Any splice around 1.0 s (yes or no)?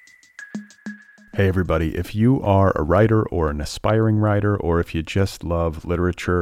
yes